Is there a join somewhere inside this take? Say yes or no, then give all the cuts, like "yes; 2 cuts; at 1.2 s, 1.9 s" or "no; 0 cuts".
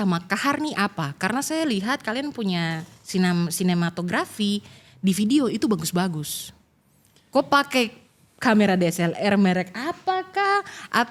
no; 0 cuts